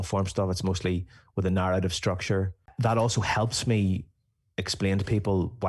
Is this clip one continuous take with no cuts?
no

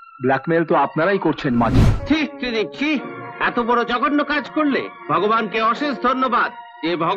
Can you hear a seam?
yes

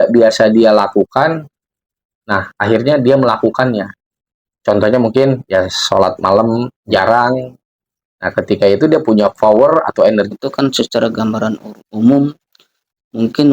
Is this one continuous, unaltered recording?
no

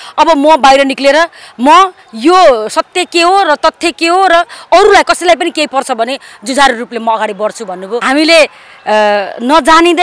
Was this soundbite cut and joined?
yes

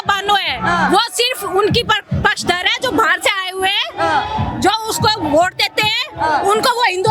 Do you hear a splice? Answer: no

